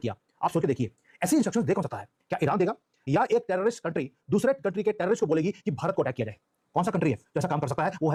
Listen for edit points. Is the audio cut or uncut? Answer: uncut